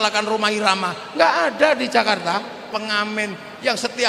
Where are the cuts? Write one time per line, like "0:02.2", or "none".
0:02.7

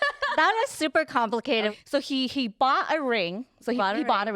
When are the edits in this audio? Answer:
0:01.7

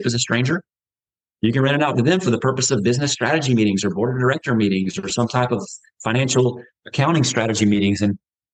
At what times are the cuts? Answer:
none

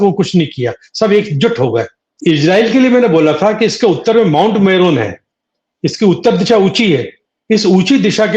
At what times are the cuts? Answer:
0:02.1

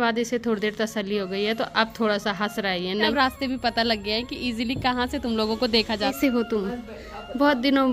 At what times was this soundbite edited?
0:03.1
0:06.1

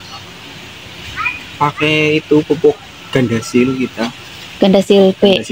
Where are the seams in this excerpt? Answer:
none

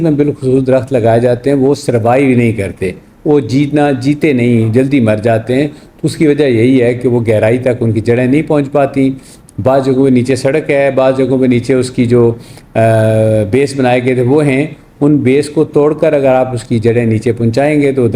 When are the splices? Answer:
none

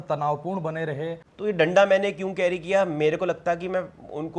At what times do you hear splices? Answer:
0:01.2

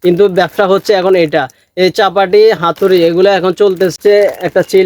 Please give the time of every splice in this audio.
0:03.9

